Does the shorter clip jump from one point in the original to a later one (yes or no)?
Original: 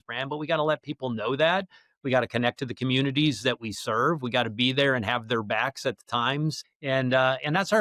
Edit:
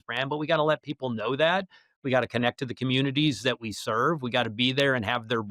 no